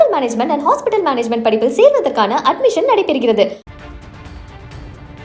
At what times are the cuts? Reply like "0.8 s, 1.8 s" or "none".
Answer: 3.6 s